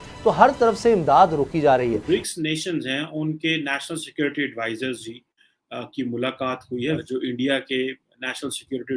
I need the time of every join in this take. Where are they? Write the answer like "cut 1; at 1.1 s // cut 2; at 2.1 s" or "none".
cut 1; at 2.0 s // cut 2; at 7.0 s